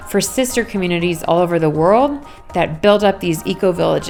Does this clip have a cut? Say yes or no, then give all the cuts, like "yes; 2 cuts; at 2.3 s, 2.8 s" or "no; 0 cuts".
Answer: no; 0 cuts